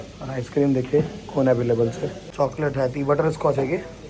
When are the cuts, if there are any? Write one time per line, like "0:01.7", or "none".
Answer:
0:02.2